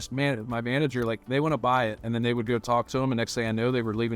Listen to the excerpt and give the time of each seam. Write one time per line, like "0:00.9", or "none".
0:02.0